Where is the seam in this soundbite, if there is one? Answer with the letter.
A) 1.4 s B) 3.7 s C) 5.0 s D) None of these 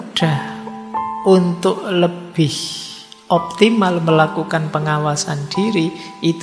D